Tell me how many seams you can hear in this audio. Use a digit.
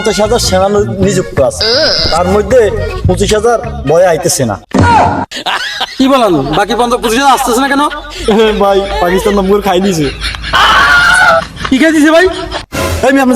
0